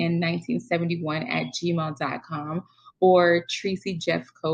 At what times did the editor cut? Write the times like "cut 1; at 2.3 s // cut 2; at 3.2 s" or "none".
none

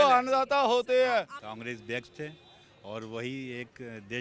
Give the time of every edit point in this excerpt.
cut 1; at 1.2 s

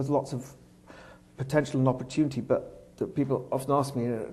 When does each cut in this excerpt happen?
cut 1; at 2.5 s

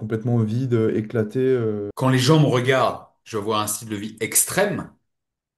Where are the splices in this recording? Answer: cut 1; at 1.9 s

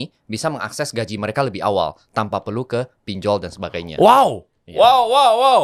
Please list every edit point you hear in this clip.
none

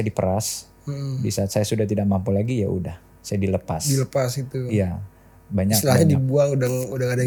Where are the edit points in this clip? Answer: none

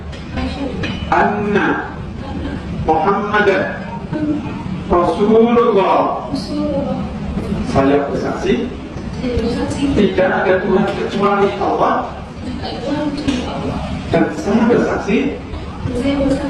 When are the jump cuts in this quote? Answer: none

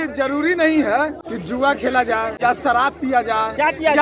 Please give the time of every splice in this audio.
cut 1; at 1.2 s // cut 2; at 2.3 s

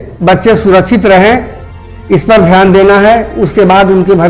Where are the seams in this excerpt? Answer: none

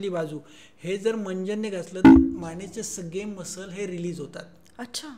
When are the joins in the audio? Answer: none

